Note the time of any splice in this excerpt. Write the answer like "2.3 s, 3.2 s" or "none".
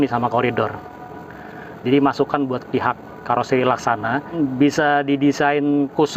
4.3 s